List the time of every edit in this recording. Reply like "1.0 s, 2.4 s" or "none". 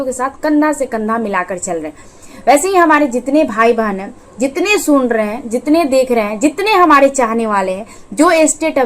none